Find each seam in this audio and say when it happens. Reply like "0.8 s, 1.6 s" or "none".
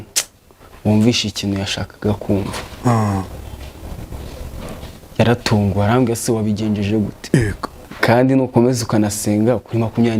7.8 s